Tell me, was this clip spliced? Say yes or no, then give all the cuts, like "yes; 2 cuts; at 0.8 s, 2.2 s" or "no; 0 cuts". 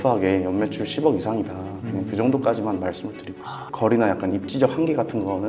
yes; 1 cut; at 3.6 s